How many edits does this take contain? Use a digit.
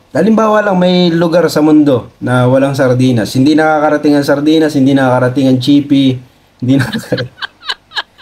0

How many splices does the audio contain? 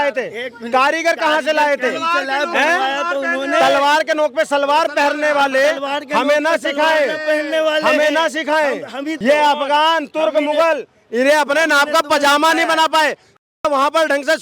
1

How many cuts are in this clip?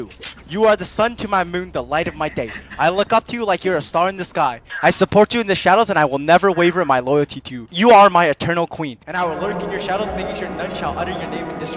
0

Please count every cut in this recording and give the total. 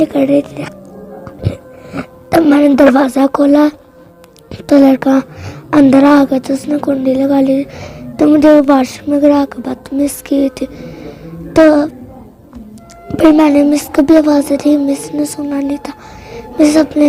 0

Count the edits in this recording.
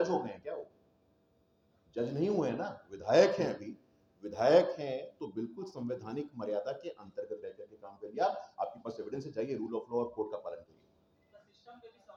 0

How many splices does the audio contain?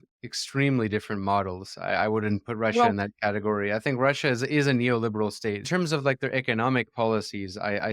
1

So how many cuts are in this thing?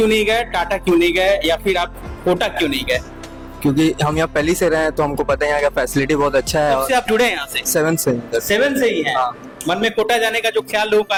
0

